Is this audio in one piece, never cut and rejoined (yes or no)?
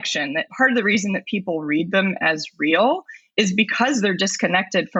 yes